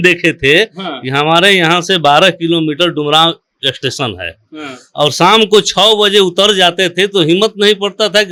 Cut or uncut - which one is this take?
uncut